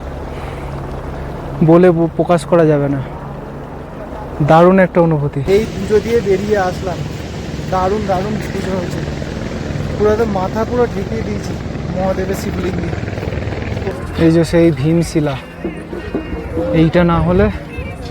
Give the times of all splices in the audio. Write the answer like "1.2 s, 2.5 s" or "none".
5.3 s, 13.9 s